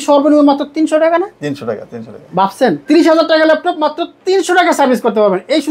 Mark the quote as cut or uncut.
uncut